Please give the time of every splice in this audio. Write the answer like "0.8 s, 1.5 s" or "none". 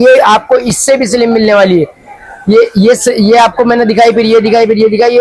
none